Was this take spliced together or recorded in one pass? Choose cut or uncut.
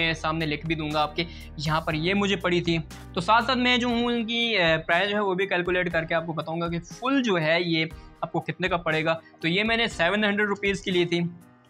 uncut